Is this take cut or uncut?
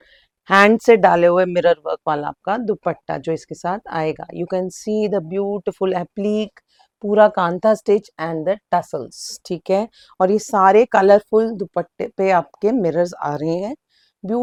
uncut